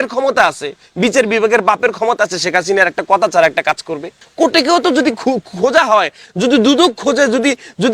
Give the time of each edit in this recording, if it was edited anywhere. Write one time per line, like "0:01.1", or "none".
0:04.2